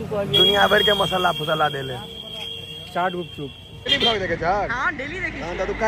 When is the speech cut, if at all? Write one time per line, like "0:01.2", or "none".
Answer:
0:03.9